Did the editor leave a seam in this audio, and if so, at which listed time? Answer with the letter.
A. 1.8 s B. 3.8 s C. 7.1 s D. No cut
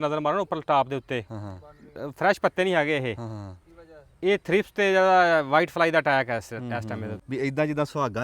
C